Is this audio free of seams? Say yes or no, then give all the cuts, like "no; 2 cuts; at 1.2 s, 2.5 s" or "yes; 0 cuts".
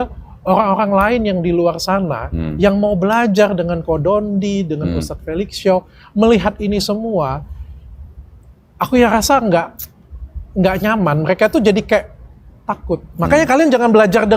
yes; 0 cuts